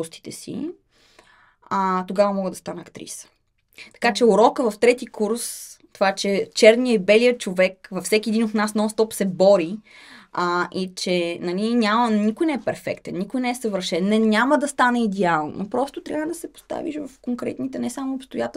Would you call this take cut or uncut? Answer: uncut